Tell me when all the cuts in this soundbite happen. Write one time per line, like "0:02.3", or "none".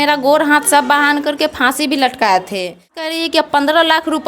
0:03.0